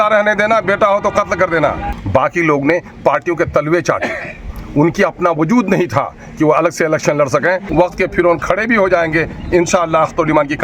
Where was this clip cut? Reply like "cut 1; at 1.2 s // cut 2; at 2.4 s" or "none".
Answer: cut 1; at 1.9 s // cut 2; at 7.6 s